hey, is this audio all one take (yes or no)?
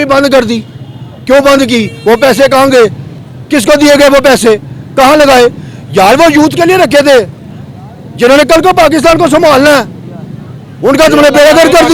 yes